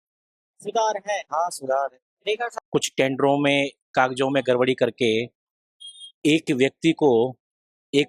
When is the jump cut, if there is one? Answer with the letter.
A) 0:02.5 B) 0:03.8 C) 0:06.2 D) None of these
A